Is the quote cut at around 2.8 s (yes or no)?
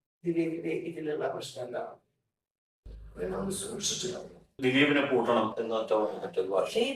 no